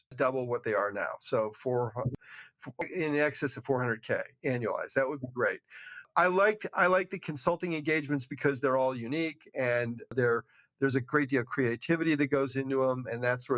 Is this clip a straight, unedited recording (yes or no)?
yes